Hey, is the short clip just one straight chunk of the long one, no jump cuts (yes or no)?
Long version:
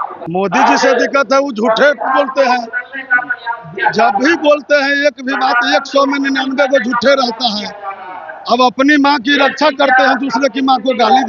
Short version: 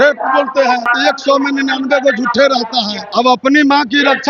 no